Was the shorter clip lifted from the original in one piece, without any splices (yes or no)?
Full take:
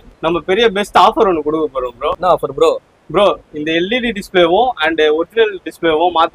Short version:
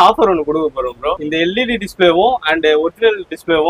no